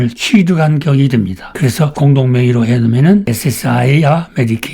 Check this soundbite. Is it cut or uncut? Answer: cut